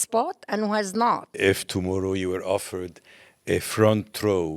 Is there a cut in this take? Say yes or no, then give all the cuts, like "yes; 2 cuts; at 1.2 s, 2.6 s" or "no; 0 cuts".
yes; 1 cut; at 1.3 s